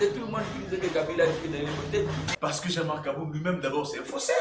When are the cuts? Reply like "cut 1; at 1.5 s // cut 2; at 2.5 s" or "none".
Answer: cut 1; at 2.3 s

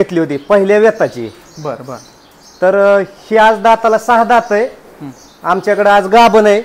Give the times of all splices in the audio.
none

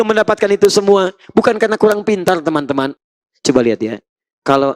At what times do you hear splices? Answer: cut 1; at 2.9 s

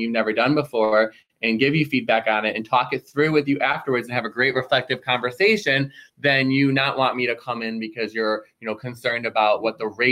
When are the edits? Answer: none

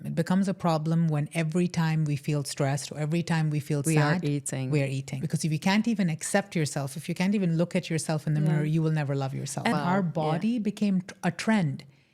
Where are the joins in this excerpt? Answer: cut 1; at 5.2 s // cut 2; at 9.7 s

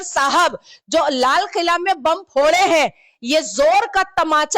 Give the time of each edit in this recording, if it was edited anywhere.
none

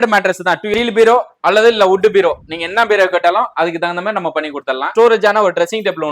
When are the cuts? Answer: cut 1; at 0.7 s // cut 2; at 4.9 s

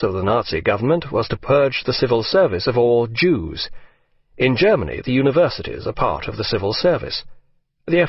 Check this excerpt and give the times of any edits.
cut 1; at 2.3 s

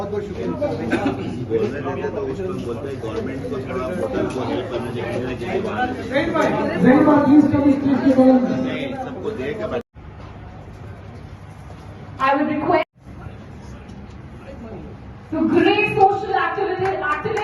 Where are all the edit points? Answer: cut 1; at 9.9 s // cut 2; at 12.9 s

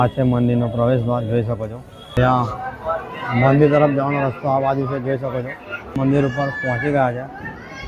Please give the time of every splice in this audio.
cut 1; at 2.2 s // cut 2; at 6.0 s

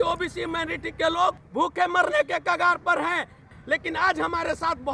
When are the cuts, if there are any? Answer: cut 1; at 1.4 s // cut 2; at 3.4 s

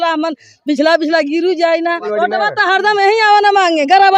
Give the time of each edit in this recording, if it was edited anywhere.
cut 1; at 2.1 s

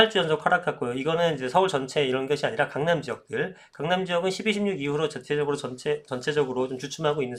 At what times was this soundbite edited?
none

